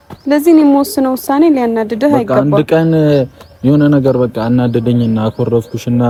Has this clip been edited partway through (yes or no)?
no